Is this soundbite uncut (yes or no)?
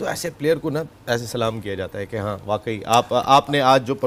yes